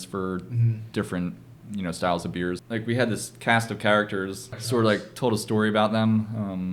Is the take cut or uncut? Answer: cut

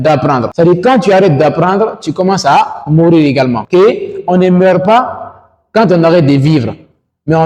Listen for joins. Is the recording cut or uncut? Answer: uncut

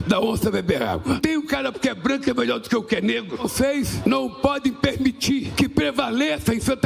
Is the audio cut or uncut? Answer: uncut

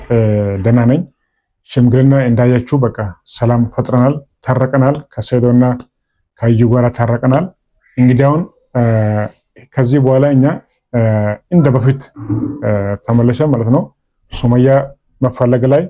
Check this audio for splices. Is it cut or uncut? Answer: uncut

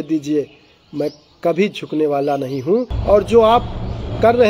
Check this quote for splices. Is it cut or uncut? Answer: cut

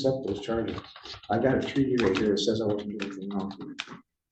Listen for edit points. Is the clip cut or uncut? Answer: uncut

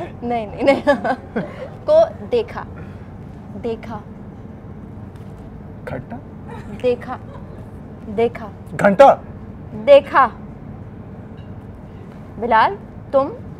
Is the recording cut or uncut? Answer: uncut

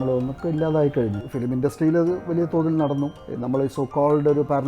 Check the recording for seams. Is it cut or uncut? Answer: cut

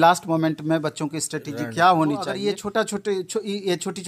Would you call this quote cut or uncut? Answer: cut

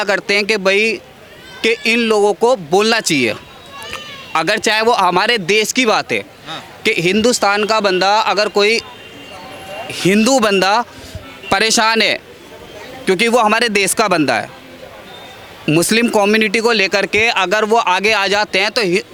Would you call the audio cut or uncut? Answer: uncut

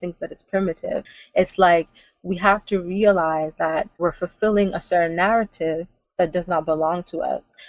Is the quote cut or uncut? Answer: cut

